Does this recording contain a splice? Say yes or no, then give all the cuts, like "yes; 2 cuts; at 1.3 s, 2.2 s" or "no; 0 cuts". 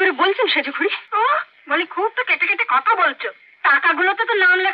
yes; 1 cut; at 1.0 s